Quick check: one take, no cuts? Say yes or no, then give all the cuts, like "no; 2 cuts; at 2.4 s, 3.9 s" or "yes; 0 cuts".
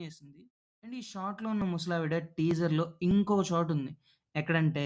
no; 1 cut; at 1.0 s